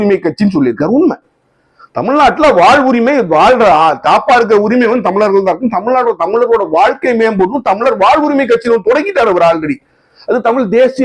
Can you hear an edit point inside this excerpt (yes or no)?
no